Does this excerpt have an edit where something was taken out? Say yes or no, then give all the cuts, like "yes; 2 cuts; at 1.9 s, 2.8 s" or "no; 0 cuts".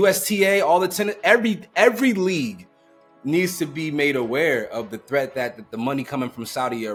no; 0 cuts